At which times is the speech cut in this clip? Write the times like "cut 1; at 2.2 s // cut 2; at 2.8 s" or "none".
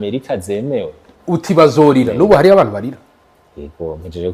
cut 1; at 1.1 s